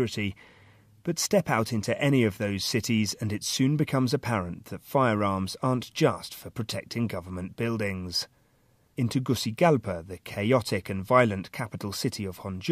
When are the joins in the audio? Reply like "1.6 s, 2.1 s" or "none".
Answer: 8.9 s